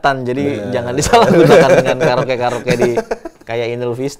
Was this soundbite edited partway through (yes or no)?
no